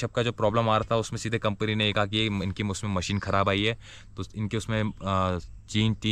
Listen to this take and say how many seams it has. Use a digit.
0